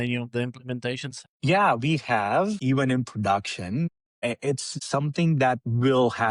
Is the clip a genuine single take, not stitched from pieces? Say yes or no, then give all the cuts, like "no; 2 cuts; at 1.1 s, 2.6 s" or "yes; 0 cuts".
no; 3 cuts; at 1.1 s, 2.6 s, 4.6 s